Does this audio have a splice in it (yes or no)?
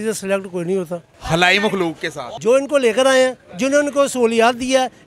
yes